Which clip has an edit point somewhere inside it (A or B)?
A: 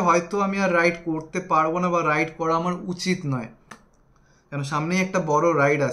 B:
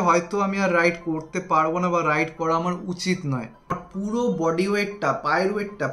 B